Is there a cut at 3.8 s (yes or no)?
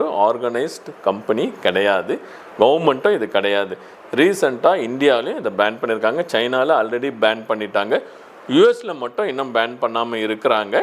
no